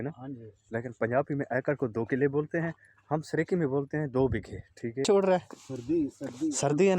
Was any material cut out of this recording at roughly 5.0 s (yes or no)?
yes